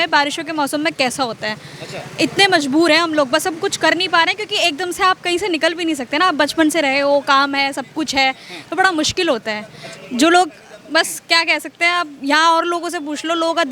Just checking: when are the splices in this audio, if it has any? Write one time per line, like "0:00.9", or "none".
none